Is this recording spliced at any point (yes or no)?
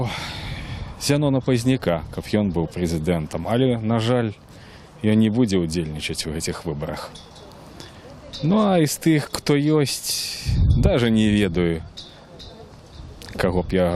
yes